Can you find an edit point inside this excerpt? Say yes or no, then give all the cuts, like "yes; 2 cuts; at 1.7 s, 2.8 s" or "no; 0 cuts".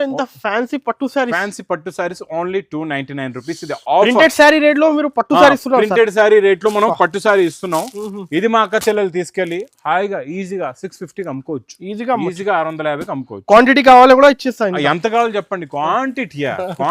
no; 0 cuts